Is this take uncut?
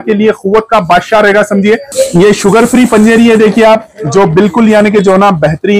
no; 1 cut; at 1.9 s

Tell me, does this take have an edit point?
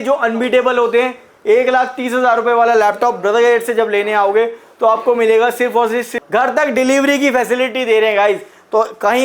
yes; 1 cut; at 6.2 s

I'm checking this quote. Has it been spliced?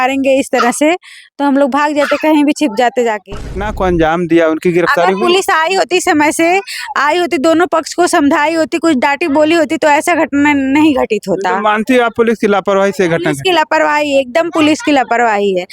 yes; 1 cut; at 3.6 s

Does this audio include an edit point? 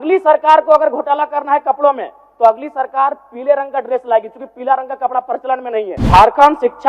yes; 1 cut; at 5.9 s

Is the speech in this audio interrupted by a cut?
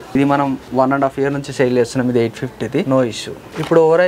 yes; 1 cut; at 3.0 s

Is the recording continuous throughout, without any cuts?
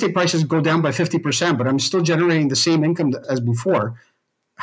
no; 1 cut; at 3.1 s

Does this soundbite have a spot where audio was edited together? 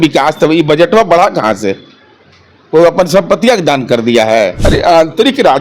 yes; 1 cut; at 4.6 s

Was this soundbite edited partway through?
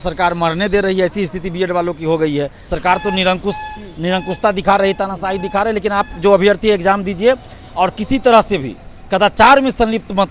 yes; 1 cut; at 2.6 s

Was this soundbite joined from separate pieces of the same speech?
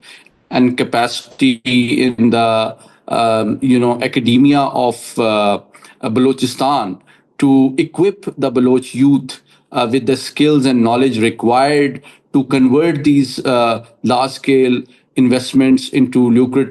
no; 0 cuts

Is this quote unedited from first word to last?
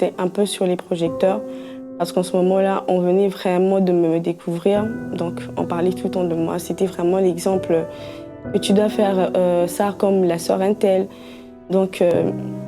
yes; 0 cuts

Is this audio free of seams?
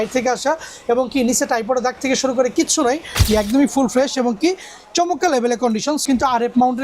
no; 2 cuts; at 3.2 s, 6.0 s

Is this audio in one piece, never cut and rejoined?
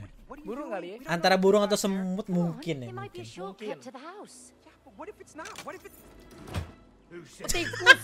yes; 0 cuts

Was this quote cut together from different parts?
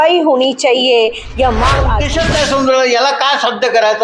yes; 1 cut; at 2.0 s

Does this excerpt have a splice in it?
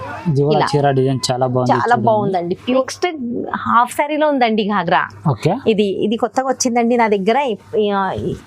yes; 1 cut; at 2.8 s

